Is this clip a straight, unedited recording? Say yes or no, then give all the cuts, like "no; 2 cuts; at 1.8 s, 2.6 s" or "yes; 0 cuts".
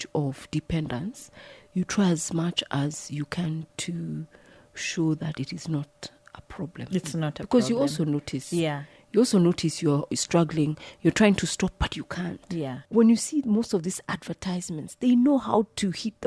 no; 1 cut; at 12.8 s